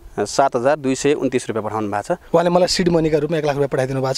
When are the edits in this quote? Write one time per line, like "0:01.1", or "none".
0:02.2